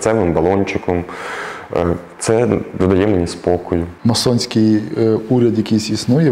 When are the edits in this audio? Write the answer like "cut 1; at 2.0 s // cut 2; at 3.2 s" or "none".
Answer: cut 1; at 3.9 s

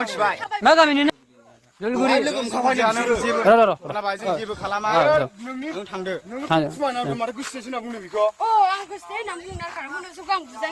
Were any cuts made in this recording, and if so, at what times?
cut 1; at 1.1 s

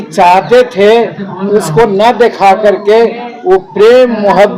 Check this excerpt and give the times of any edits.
none

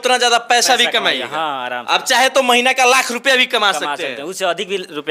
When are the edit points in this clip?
none

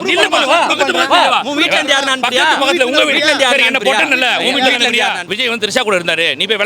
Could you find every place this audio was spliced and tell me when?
cut 1; at 5.3 s

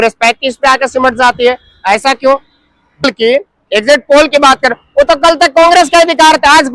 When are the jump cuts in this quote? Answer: cut 1; at 3.0 s

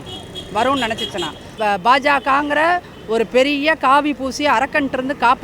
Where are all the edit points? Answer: cut 1; at 1.5 s

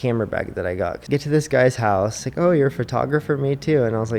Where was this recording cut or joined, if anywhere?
cut 1; at 1.0 s // cut 2; at 2.2 s

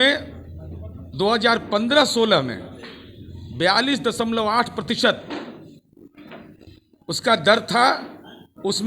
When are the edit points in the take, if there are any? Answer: none

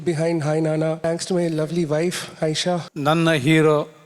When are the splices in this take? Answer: cut 1; at 1.0 s // cut 2; at 2.9 s

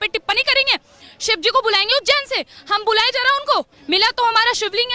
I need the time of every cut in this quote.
cut 1; at 3.8 s

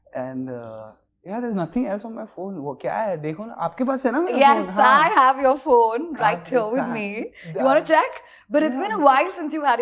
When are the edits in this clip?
none

